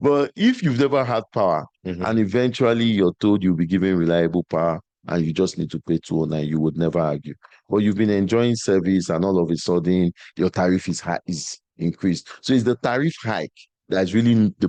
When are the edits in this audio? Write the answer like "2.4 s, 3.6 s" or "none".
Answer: none